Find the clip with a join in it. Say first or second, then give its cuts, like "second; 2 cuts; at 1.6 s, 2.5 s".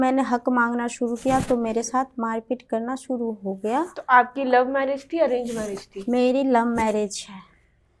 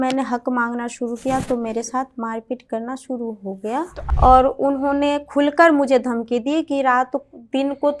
second; 1 cut; at 4.0 s